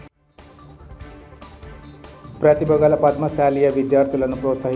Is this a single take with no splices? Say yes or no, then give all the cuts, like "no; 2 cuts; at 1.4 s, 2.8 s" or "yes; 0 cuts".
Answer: yes; 0 cuts